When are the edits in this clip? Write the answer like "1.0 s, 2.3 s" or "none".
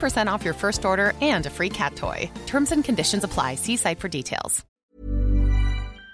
4.8 s